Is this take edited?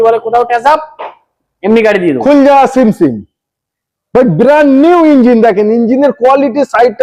no; 0 cuts

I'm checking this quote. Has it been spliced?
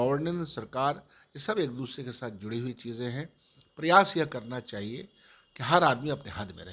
no; 0 cuts

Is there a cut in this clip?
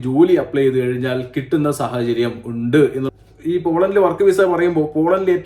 yes; 1 cut; at 3.1 s

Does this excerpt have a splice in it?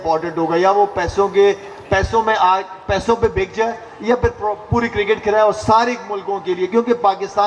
no; 0 cuts

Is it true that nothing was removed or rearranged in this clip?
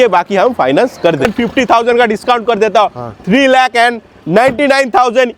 no; 1 cut; at 1.2 s

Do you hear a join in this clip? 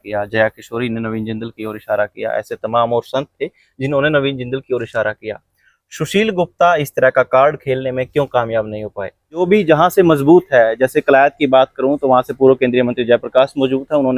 yes; 1 cut; at 9.4 s

